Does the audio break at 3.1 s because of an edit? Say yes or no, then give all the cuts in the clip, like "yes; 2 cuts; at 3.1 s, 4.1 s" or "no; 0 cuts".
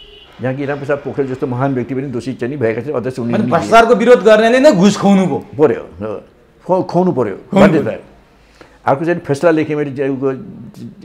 no; 0 cuts